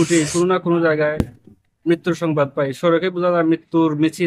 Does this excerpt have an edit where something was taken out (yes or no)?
no